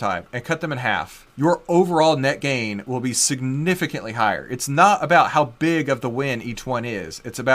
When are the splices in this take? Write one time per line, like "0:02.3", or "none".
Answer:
0:01.2